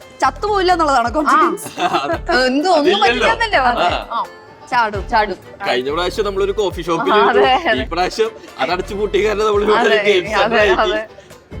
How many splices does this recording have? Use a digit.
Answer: 1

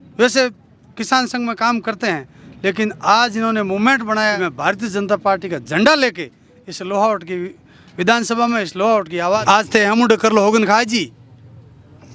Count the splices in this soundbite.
2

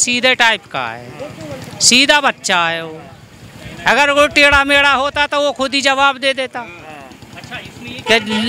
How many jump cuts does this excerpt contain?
0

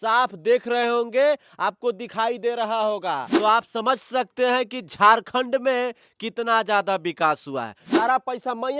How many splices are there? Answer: 2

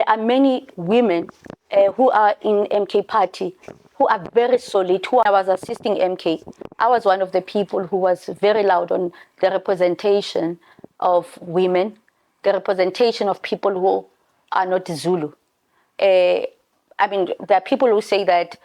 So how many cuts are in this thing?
1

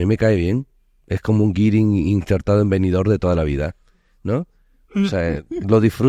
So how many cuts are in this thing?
0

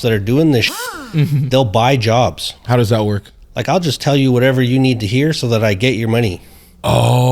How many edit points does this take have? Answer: 1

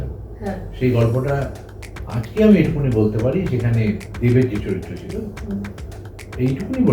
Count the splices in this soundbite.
1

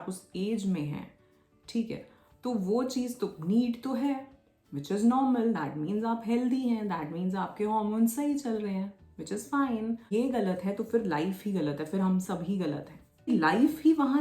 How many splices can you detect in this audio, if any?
2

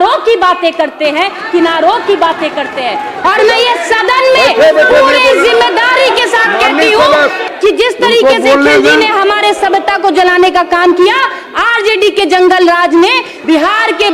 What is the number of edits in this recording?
2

